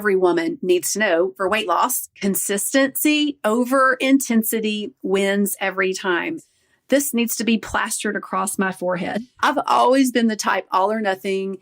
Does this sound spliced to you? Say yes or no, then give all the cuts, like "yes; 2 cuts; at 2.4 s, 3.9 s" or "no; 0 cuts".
yes; 3 cuts; at 1.3 s, 2.1 s, 6.4 s